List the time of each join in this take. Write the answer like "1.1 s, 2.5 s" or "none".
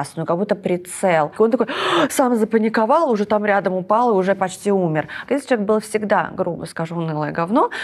1.3 s, 5.2 s